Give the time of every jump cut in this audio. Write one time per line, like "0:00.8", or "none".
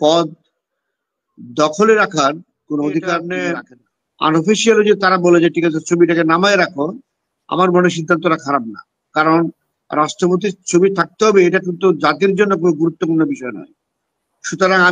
0:03.4